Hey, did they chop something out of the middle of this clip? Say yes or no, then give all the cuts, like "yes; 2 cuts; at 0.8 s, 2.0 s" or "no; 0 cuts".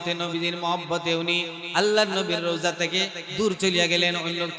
no; 0 cuts